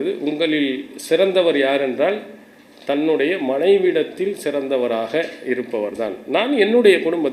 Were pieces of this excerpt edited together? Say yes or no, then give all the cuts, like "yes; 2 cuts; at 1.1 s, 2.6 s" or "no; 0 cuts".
no; 0 cuts